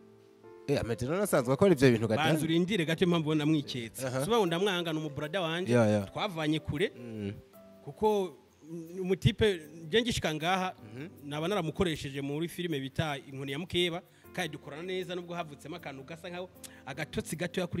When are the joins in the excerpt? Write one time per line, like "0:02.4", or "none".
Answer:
none